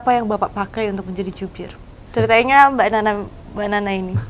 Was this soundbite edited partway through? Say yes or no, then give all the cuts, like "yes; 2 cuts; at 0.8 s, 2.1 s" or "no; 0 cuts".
no; 0 cuts